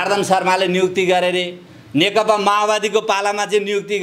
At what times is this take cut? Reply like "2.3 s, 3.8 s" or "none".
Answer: none